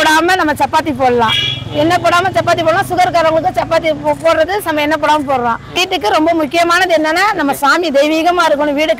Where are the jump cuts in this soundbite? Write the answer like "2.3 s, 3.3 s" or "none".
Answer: 5.8 s